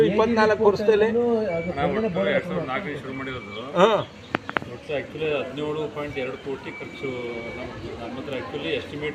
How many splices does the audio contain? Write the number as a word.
zero